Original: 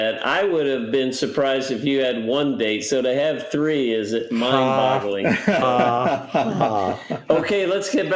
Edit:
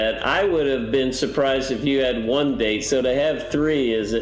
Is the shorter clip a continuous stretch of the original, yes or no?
yes